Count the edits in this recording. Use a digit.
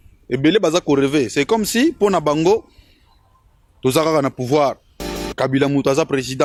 0